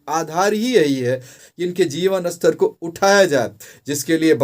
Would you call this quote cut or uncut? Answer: cut